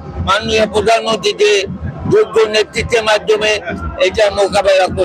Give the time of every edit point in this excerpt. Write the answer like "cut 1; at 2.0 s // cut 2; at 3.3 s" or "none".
none